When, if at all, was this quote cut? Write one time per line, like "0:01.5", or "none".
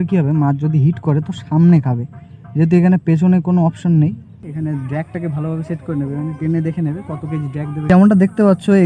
0:04.4
0:07.9